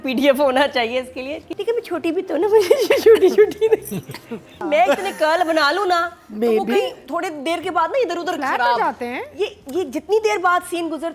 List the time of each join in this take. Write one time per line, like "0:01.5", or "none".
0:01.5
0:04.6